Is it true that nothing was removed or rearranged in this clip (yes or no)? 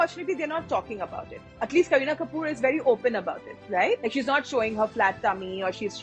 no